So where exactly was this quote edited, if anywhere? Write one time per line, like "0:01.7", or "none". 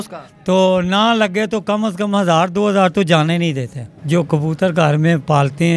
0:04.0